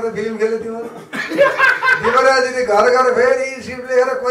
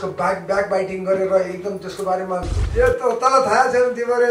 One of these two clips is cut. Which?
second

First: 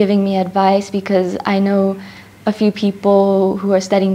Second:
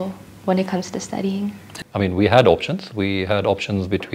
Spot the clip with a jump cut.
second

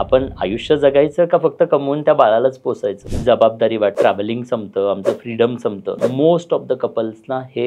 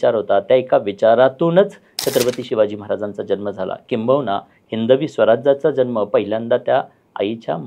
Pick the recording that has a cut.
first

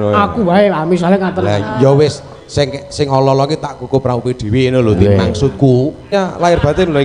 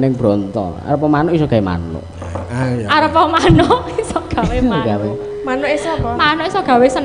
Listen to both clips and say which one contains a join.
first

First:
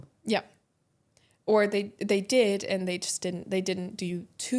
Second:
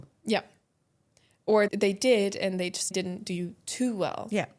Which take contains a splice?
second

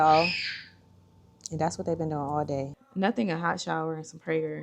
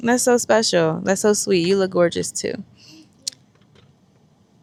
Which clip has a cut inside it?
first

